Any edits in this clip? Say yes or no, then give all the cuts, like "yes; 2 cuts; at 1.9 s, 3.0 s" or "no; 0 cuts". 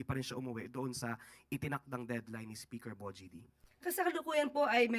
no; 0 cuts